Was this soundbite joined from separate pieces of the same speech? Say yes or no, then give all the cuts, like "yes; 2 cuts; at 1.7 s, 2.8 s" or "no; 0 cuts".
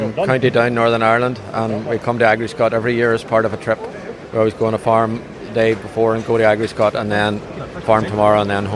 no; 0 cuts